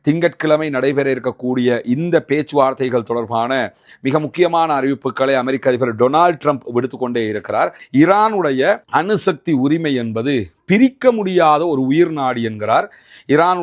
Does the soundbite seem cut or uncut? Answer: cut